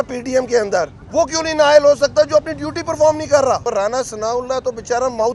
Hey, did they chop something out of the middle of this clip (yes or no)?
yes